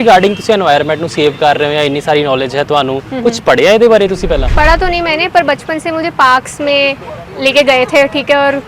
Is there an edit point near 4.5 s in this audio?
yes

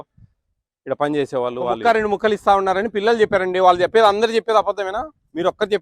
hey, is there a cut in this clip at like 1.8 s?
yes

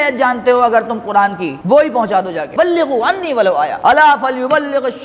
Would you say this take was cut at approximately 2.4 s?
yes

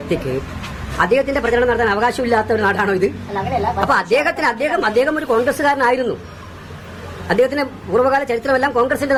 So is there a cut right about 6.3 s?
no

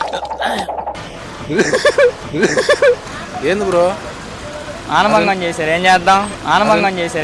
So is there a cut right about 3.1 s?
yes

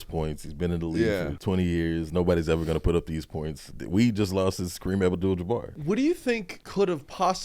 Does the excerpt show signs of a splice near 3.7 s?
yes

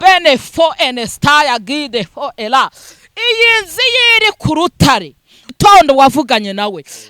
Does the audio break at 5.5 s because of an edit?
yes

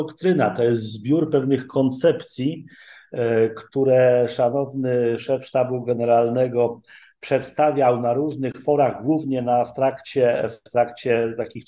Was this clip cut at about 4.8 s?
no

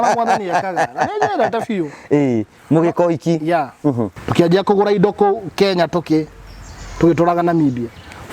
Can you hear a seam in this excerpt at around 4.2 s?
yes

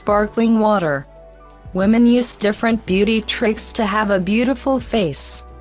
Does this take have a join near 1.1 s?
yes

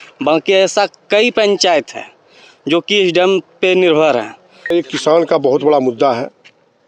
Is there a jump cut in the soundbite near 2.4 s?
no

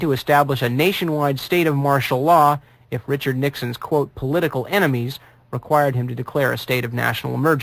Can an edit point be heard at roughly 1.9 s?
yes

